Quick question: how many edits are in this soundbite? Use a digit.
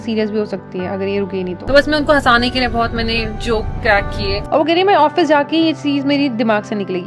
2